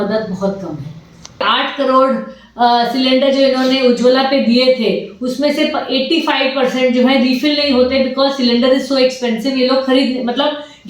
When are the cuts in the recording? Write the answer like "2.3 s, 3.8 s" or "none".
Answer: 1.4 s